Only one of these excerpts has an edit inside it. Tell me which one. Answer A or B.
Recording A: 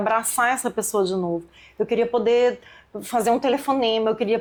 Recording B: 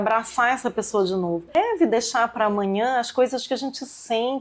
B